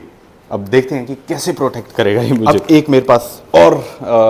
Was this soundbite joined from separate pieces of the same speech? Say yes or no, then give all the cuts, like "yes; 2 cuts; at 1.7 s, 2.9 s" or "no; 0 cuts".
yes; 1 cut; at 2.4 s